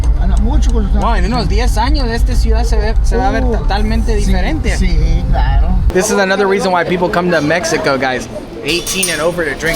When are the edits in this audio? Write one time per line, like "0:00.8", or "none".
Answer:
0:05.9